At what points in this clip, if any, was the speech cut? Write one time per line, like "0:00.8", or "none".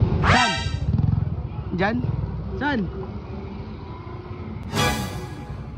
none